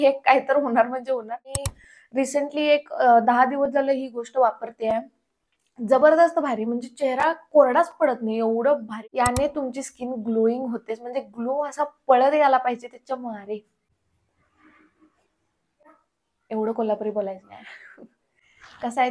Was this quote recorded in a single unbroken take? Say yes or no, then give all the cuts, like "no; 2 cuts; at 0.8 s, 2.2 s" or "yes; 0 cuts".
no; 3 cuts; at 1.6 s, 9.0 s, 14.0 s